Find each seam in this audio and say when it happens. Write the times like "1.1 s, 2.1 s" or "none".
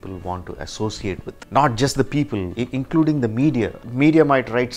1.3 s, 2.5 s, 3.8 s